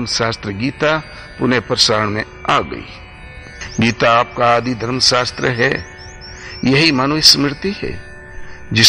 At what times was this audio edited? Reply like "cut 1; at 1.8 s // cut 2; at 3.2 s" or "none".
none